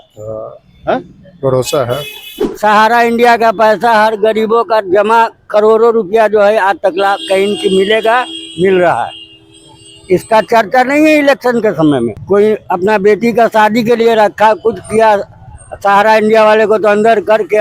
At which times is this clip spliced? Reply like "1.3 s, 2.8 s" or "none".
2.4 s, 12.2 s